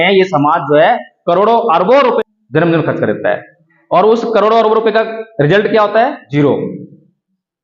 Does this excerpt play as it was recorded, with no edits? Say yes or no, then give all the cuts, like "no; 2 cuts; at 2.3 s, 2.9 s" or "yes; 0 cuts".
no; 2 cuts; at 2.2 s, 6.2 s